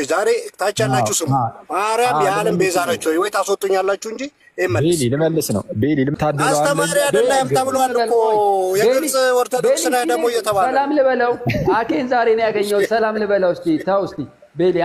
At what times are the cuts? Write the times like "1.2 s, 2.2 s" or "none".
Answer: 6.1 s

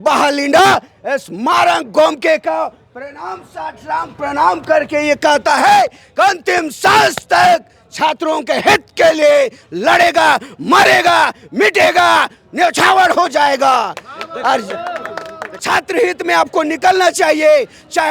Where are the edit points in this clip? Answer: 15.4 s

